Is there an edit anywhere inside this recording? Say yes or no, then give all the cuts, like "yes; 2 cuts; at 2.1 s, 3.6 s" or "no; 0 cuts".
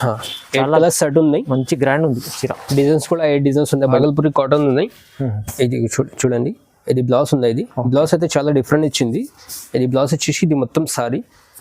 yes; 1 cut; at 4.0 s